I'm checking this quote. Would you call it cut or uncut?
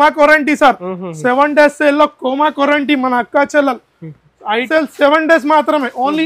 cut